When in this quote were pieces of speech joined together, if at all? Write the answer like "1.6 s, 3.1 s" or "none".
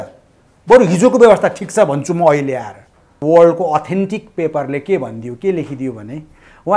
3.1 s